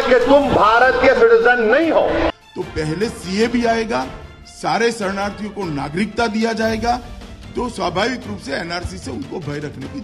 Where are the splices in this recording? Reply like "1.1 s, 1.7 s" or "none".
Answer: 2.3 s